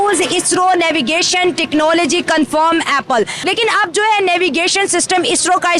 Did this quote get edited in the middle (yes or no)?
yes